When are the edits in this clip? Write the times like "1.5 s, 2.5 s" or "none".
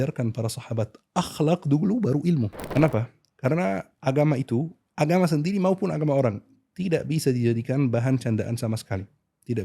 2.6 s